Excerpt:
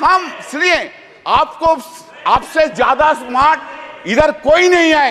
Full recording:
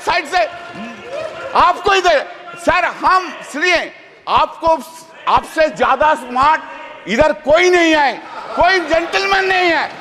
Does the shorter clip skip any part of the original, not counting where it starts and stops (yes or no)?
no